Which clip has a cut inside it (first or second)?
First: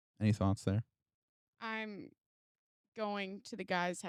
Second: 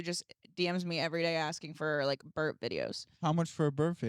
second